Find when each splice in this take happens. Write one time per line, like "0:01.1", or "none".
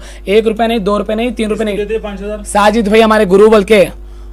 none